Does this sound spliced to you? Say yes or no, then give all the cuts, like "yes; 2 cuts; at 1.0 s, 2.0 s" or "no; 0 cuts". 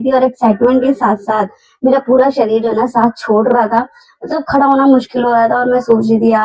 no; 0 cuts